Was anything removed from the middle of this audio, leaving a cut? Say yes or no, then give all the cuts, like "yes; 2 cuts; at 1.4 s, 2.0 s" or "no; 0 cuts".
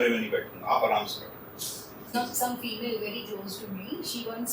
yes; 1 cut; at 2.0 s